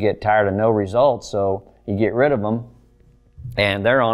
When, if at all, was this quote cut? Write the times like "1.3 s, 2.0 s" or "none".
none

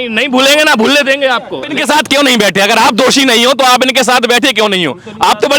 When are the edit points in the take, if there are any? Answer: 1.7 s

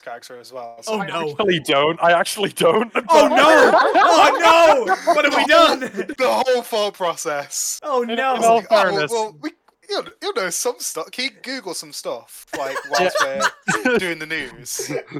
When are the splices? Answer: 6.0 s

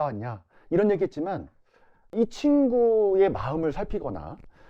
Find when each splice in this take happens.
2.1 s

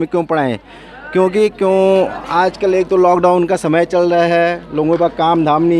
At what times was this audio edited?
none

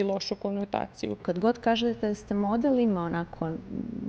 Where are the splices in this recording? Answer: 1.3 s

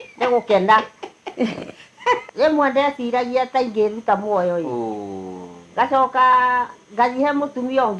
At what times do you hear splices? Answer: 2.2 s

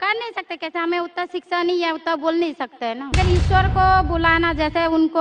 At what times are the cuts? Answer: 3.1 s

